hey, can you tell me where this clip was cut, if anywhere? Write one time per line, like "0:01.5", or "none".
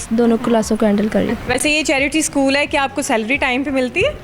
0:01.4